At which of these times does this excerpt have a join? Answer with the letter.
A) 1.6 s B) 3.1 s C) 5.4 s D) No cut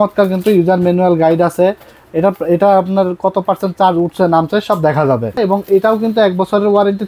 C